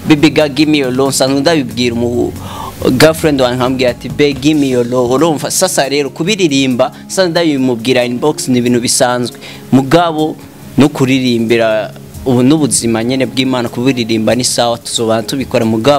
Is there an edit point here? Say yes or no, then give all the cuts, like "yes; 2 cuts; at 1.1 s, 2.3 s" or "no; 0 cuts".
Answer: no; 0 cuts